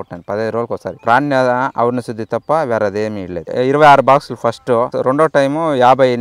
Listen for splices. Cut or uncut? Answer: cut